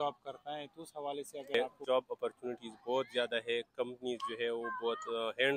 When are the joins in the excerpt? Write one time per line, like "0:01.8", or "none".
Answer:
0:01.5